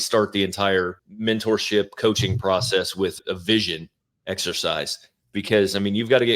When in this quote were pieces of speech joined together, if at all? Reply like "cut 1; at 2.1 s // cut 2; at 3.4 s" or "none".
cut 1; at 1.0 s // cut 2; at 3.2 s